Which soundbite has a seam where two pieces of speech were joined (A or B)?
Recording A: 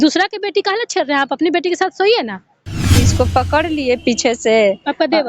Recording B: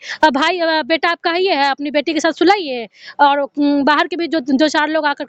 A